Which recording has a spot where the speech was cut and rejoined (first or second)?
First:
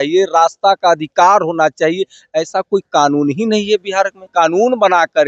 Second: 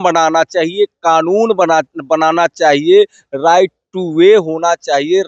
first